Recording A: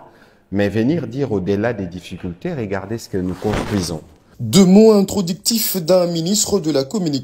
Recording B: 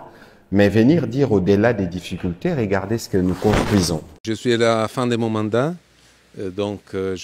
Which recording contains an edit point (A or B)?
B